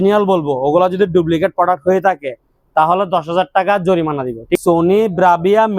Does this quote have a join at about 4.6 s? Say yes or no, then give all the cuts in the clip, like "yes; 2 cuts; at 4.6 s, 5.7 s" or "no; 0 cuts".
yes; 1 cut; at 4.6 s